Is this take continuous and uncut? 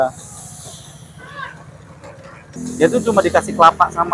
no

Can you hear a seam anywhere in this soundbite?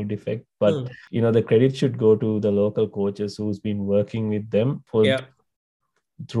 yes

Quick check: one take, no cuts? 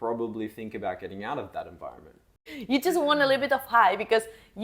no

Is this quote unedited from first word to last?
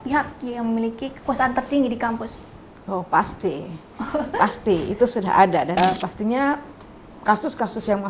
no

